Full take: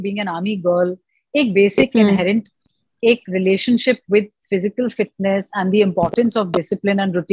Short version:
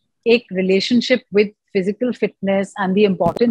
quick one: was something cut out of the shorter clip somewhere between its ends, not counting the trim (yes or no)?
no